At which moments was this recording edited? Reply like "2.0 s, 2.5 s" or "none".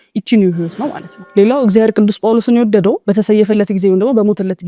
1.1 s

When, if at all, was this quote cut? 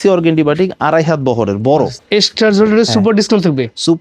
2.0 s

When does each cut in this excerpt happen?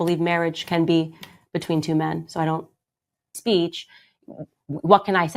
3.3 s

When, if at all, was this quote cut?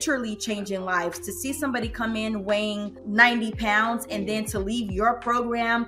3.0 s

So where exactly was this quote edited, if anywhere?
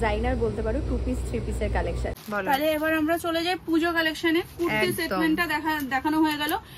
2.2 s

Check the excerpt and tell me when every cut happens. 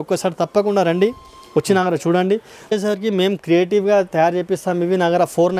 2.7 s

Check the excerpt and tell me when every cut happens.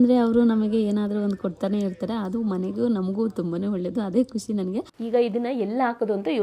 5.0 s

